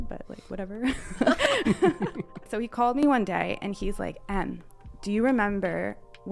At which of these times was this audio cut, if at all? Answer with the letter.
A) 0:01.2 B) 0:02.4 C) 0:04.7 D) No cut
B